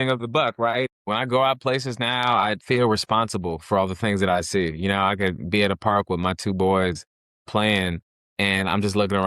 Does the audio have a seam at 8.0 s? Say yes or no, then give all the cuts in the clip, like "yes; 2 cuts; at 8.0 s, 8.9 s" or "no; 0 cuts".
no; 1 cut; at 0.9 s